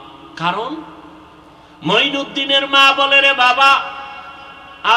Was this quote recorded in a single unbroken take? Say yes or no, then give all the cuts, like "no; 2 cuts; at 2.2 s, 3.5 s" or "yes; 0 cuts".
yes; 0 cuts